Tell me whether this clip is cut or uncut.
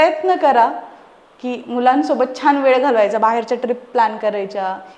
uncut